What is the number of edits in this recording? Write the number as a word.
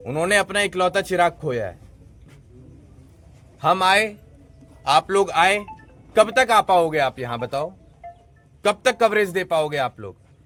zero